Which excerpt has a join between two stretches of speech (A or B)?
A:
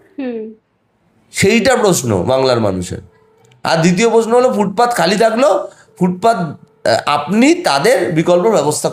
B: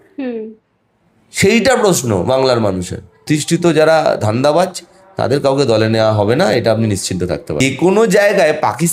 B